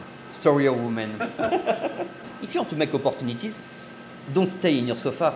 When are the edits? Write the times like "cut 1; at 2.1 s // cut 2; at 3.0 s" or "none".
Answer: cut 1; at 2.2 s